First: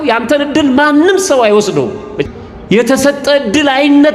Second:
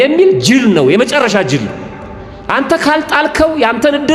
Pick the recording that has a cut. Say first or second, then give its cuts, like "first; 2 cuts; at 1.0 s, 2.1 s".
first; 1 cut; at 2.2 s